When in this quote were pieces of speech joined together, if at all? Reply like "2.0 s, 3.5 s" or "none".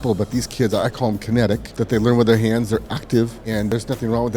1.7 s, 3.7 s